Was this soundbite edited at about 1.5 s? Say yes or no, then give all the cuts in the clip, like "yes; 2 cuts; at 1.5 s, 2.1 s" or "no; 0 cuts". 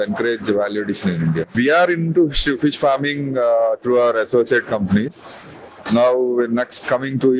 yes; 1 cut; at 1.5 s